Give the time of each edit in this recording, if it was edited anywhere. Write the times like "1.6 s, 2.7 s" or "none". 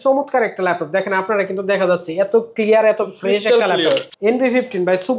4.1 s